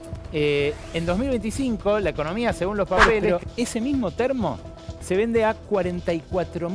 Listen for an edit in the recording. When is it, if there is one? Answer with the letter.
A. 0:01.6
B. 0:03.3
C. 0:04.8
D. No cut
B